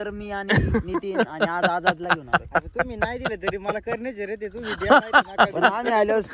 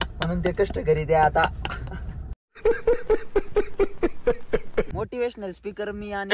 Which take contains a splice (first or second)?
second